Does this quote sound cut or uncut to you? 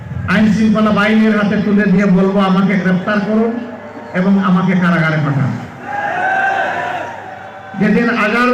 uncut